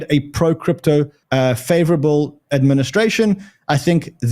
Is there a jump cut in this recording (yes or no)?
yes